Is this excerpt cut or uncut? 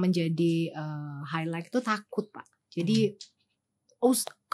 uncut